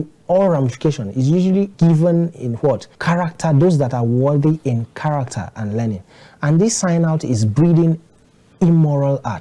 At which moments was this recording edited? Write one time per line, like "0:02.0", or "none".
0:01.7